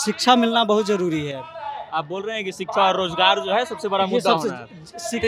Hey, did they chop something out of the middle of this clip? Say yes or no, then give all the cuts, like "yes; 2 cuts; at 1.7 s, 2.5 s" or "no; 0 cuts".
no; 0 cuts